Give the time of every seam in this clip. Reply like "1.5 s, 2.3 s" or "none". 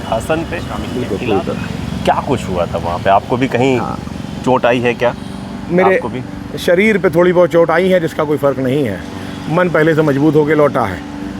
1.1 s

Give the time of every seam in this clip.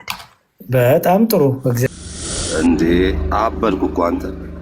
1.9 s

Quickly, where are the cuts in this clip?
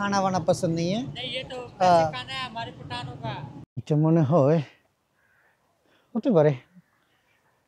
3.8 s

